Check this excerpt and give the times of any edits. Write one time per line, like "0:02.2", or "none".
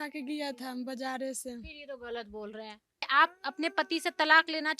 0:03.1

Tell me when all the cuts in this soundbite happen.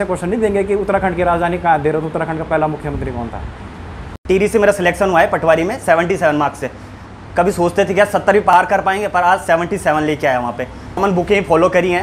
0:04.1
0:08.5
0:11.0

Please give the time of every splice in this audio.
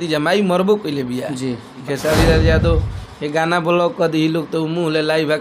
0:01.8

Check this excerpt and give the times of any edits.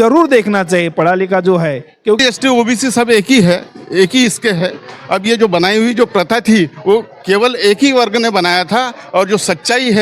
0:02.2

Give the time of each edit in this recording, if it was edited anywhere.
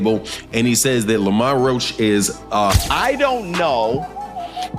0:02.7

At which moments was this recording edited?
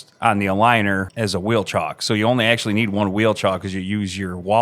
0:01.1

